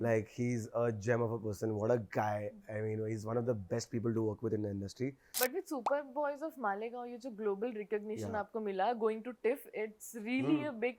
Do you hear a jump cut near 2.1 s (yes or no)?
no